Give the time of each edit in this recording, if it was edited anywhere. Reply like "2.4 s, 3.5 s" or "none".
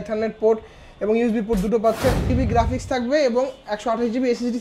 2.3 s